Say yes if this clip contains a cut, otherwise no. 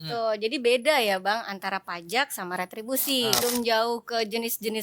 yes